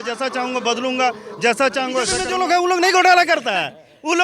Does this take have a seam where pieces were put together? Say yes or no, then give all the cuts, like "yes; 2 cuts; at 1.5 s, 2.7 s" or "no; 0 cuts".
yes; 1 cut; at 2.2 s